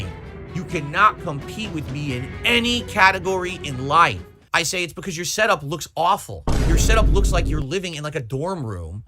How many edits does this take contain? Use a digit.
1